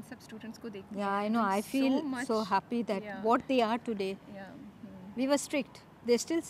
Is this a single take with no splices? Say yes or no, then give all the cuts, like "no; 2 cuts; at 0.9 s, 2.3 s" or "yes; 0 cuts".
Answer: yes; 0 cuts